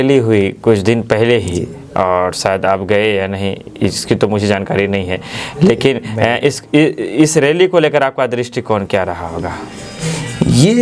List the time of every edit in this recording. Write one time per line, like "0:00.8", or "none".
none